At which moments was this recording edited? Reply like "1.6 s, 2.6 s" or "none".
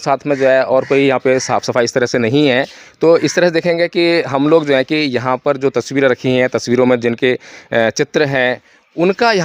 none